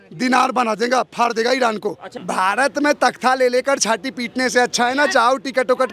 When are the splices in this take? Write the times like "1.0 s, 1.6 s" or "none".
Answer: 2.1 s